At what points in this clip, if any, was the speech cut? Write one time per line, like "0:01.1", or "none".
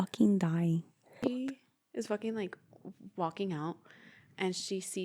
0:01.2